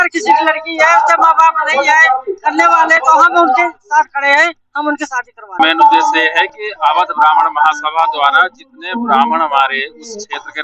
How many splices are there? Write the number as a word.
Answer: one